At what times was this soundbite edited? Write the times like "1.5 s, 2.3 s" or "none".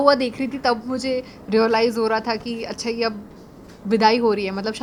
none